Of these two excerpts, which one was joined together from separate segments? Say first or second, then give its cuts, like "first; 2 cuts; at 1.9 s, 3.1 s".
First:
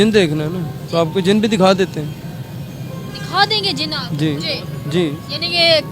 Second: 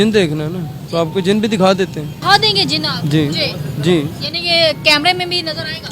second; 1 cut; at 2.1 s